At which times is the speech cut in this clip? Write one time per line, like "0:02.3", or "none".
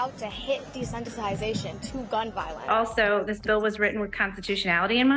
0:02.6